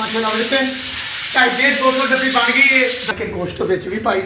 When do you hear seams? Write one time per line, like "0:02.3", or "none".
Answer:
0:03.1